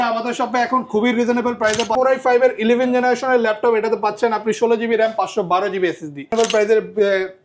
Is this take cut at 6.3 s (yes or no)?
yes